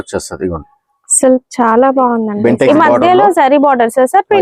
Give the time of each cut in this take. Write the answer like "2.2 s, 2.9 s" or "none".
2.3 s